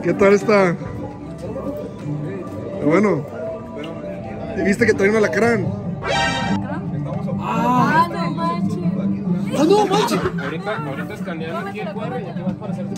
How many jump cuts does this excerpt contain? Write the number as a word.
zero